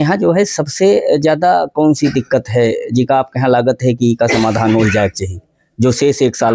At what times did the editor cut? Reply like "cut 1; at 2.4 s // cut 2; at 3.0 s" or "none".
none